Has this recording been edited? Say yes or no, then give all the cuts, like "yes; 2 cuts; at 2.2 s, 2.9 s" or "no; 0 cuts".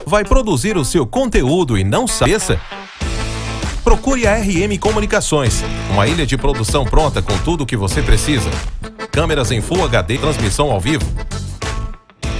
yes; 2 cuts; at 2.3 s, 10.2 s